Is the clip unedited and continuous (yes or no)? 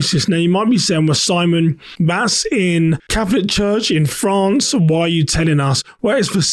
no